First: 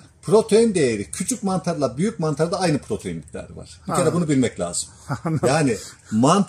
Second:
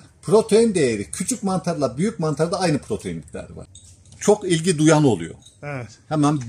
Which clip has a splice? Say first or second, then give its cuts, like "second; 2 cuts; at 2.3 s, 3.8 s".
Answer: second; 1 cut; at 3.6 s